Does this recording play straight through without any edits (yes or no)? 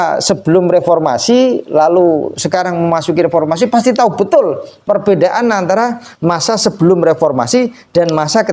yes